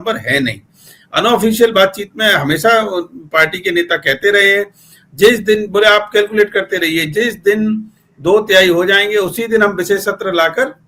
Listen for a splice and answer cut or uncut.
uncut